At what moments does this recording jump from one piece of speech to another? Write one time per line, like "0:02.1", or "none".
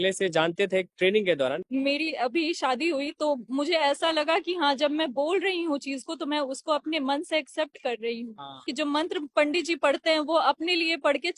0:01.6
0:08.7